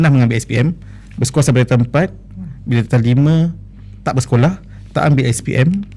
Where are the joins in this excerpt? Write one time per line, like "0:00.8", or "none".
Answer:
none